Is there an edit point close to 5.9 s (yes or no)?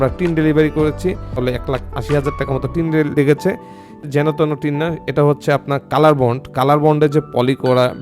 no